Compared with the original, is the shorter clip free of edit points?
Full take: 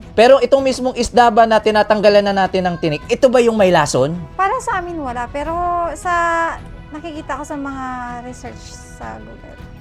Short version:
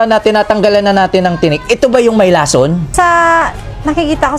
no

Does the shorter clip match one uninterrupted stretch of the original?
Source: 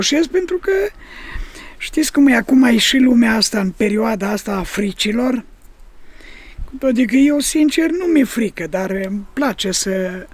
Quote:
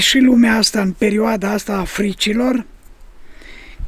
yes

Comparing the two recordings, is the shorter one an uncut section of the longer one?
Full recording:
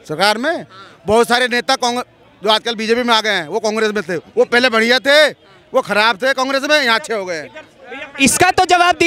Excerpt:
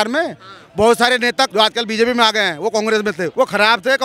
no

